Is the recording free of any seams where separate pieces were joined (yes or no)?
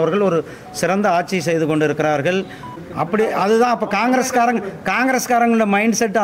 no